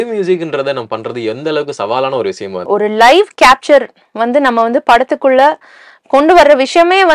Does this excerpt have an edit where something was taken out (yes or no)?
yes